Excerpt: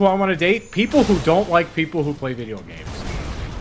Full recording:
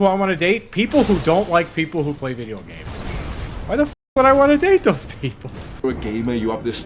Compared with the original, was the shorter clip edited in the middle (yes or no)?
no